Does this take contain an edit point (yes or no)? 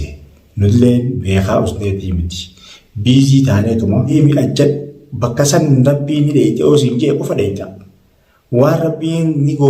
yes